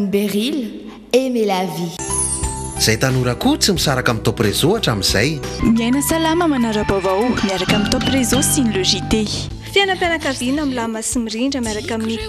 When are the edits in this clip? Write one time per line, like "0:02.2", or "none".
0:02.0